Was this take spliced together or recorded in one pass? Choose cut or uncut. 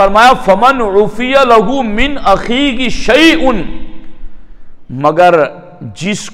uncut